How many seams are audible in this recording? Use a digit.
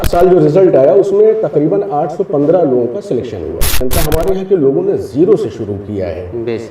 1